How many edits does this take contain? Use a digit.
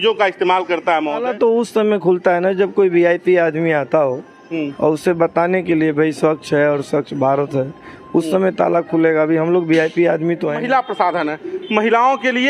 2